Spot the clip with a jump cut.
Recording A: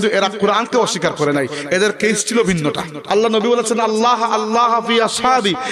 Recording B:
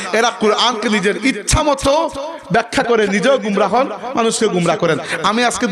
A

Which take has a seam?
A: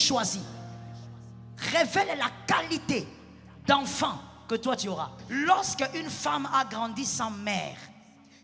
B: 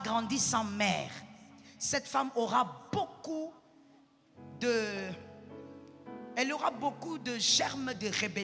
A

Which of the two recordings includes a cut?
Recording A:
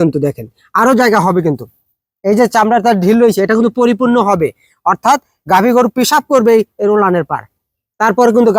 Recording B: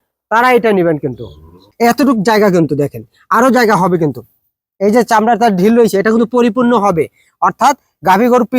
B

